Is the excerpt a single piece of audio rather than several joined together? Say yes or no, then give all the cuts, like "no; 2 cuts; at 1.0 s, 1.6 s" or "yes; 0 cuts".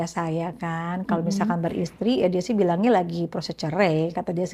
yes; 0 cuts